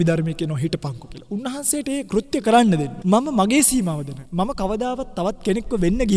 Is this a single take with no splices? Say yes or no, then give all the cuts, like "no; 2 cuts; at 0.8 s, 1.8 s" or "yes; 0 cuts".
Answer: no; 2 cuts; at 2.9 s, 4.2 s